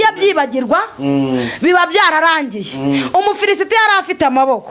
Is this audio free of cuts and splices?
yes; 0 cuts

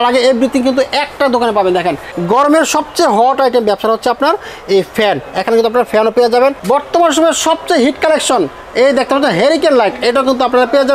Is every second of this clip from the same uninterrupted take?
no; 2 cuts; at 2.1 s, 6.6 s

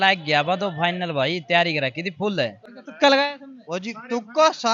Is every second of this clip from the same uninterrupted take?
no; 1 cut; at 2.7 s

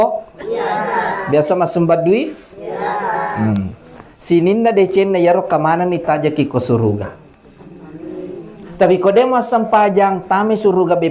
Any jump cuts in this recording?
no; 0 cuts

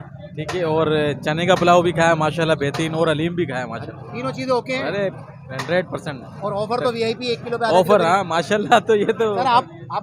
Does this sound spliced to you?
no; 0 cuts

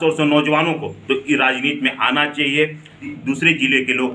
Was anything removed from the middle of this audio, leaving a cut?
yes; 1 cut; at 3.2 s

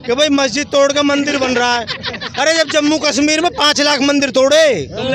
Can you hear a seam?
no; 0 cuts

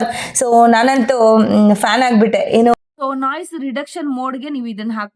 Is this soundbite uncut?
no; 1 cut; at 2.7 s

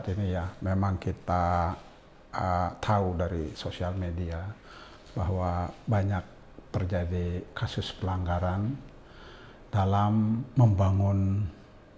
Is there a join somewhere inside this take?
no; 0 cuts

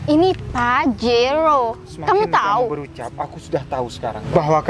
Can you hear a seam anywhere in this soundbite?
no; 0 cuts

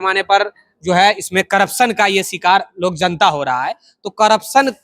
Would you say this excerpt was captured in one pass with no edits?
yes; 0 cuts

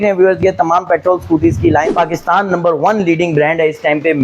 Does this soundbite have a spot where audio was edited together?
yes; 1 cut; at 1.9 s

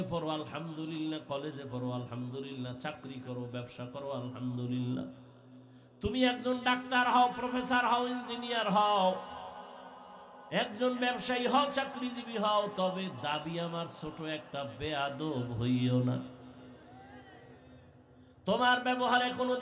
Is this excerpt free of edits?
yes; 0 cuts

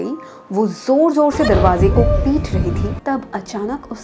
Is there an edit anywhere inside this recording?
yes; 1 cut; at 2.9 s

